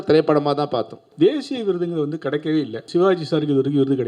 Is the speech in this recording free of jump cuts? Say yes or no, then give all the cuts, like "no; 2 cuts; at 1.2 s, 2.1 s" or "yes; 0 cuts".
no; 2 cuts; at 1.0 s, 2.9 s